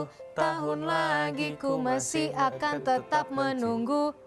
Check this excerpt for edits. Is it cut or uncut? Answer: uncut